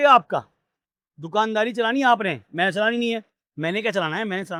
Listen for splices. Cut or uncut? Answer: uncut